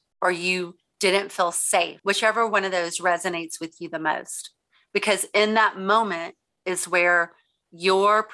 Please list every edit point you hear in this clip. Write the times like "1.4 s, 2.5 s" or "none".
2.0 s